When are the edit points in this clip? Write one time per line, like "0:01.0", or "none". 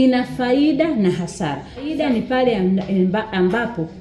0:01.9